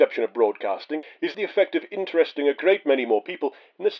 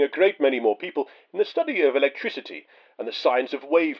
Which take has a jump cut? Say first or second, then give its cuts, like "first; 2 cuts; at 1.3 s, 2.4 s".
first; 1 cut; at 1.3 s